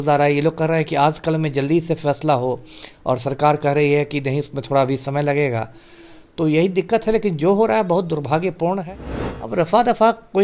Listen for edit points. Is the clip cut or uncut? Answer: cut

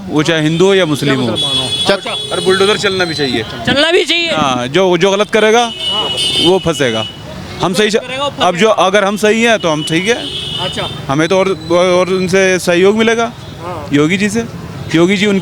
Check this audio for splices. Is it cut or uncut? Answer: uncut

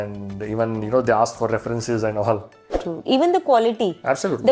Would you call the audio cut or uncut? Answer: cut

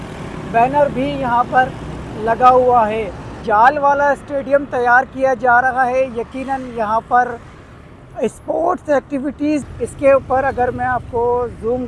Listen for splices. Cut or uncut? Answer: cut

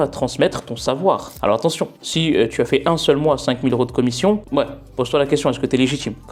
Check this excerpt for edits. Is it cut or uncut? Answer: uncut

